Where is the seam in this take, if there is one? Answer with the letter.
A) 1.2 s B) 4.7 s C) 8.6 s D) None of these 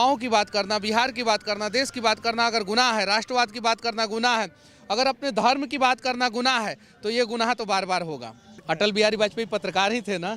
C